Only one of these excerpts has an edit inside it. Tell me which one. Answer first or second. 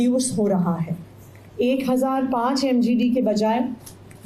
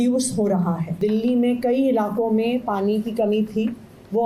second